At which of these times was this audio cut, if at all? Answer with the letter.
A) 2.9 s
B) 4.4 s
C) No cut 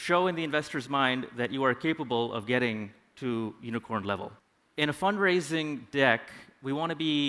B